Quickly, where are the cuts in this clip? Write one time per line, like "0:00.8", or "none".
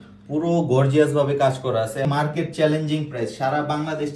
0:02.0